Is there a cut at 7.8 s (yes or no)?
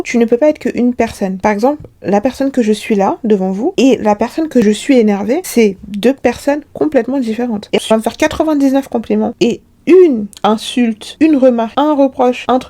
yes